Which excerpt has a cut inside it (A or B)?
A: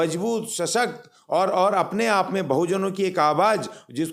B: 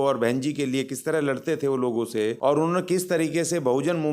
B